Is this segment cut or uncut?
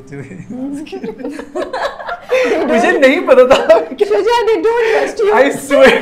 uncut